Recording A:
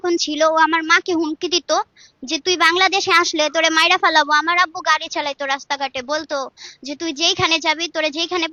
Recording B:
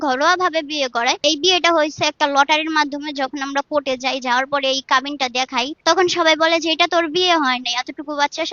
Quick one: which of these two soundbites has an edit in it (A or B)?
B